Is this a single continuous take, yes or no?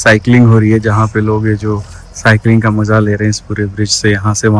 yes